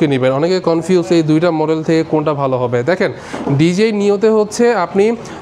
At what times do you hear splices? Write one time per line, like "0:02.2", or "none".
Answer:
none